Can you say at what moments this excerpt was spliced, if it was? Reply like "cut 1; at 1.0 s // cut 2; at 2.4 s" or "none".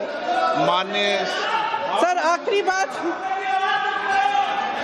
cut 1; at 2.6 s